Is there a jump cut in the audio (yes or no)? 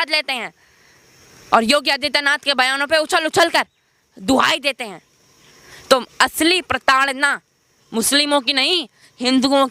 no